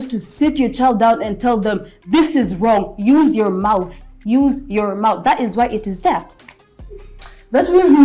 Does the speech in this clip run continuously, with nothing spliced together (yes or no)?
yes